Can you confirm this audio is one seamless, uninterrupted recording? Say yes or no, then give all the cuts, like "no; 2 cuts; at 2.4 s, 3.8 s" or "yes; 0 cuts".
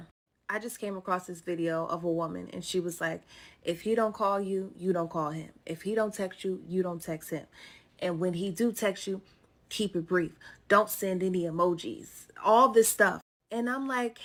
yes; 0 cuts